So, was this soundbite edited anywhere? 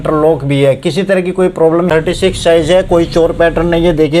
yes; 1 cut; at 1.9 s

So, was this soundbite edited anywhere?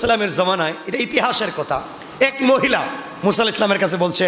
yes; 2 cuts; at 2.0 s, 3.0 s

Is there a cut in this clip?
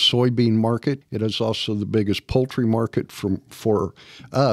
yes; 1 cut; at 1.1 s

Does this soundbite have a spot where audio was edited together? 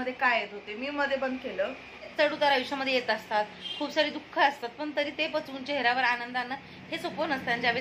yes; 1 cut; at 2.1 s

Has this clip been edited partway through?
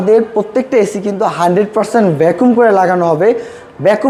no; 0 cuts

